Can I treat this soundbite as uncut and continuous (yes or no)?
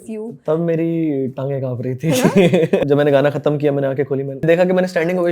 no